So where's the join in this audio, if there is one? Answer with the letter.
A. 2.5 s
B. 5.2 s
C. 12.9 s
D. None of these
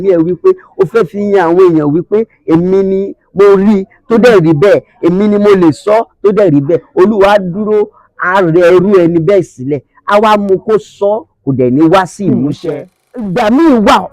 C